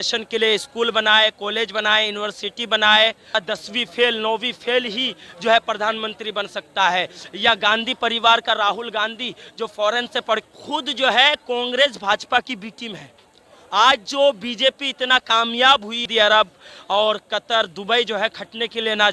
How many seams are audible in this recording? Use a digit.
3